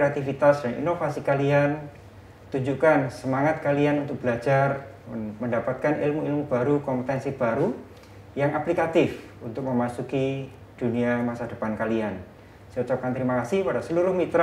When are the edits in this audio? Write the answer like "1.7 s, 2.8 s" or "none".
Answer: none